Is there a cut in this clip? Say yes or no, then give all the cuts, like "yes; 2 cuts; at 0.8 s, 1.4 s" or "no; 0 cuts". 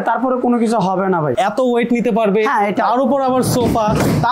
yes; 1 cut; at 1.3 s